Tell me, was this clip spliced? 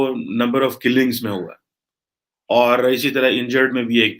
no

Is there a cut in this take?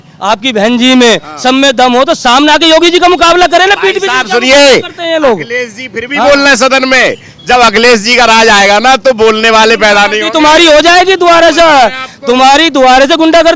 no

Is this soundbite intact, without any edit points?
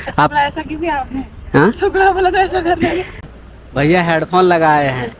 no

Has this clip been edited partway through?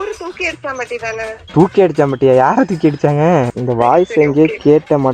yes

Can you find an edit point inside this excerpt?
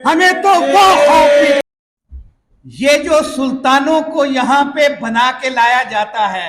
yes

